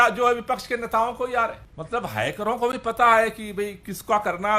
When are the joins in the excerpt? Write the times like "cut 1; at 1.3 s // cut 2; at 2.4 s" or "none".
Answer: cut 1; at 1.7 s